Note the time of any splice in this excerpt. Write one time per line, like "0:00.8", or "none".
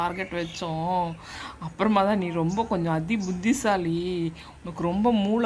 none